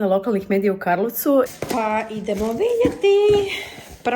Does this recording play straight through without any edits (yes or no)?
no